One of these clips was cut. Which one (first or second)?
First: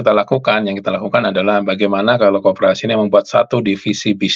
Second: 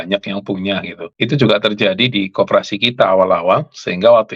second